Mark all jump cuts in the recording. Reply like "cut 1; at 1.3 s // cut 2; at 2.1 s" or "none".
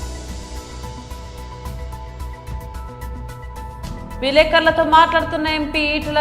cut 1; at 1.3 s // cut 2; at 2.6 s